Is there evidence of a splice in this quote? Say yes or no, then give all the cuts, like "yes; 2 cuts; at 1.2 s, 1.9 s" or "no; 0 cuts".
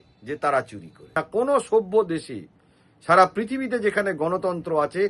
yes; 1 cut; at 1.1 s